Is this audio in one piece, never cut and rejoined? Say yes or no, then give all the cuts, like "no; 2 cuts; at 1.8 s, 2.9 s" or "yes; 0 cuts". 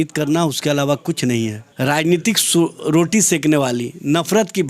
no; 1 cut; at 1.6 s